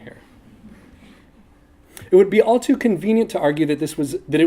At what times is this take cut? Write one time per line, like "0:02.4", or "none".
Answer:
0:03.3